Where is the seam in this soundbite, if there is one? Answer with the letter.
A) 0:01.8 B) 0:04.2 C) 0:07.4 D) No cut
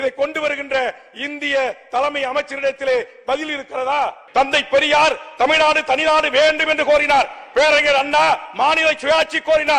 B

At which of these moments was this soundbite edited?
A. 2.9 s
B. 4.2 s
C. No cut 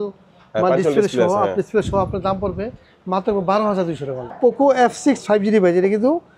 B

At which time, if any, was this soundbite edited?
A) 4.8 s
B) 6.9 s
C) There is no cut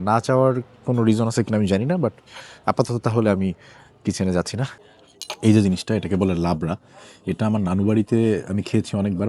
A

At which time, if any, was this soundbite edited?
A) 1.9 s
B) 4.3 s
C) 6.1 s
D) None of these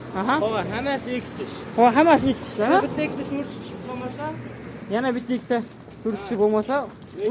D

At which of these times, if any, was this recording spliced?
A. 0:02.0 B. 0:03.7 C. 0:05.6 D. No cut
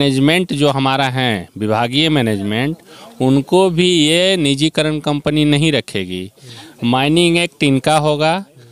D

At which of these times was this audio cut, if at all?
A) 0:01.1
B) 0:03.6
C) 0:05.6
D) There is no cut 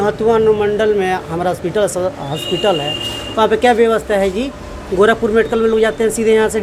D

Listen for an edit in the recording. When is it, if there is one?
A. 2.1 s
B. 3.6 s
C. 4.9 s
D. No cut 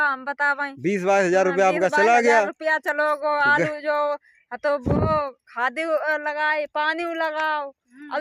D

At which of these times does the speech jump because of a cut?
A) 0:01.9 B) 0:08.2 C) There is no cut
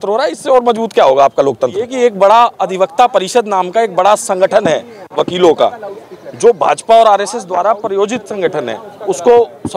A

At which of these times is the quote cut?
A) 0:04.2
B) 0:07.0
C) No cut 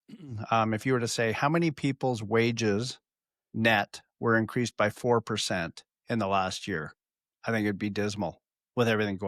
C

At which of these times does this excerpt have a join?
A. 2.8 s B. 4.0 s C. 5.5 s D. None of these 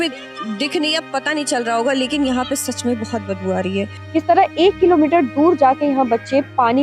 B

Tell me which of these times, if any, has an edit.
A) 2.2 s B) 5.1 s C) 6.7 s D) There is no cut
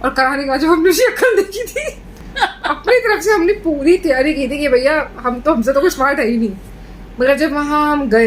A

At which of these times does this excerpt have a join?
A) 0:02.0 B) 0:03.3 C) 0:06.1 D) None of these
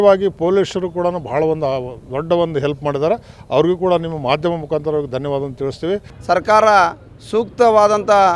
C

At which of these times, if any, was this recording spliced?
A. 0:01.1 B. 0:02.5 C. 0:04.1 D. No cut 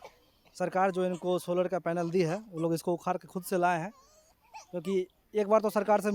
D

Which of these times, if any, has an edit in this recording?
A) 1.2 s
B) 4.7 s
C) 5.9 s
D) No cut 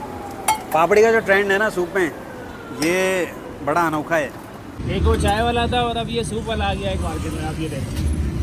B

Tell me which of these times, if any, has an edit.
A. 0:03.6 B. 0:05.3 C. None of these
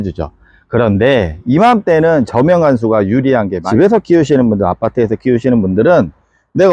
A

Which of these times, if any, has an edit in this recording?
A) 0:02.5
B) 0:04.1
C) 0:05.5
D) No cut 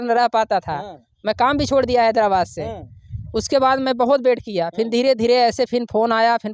D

